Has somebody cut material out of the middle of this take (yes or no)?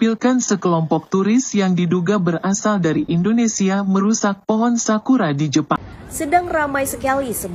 yes